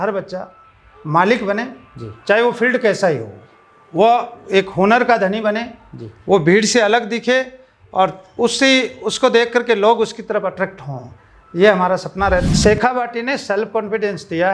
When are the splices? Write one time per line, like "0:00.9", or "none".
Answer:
0:12.4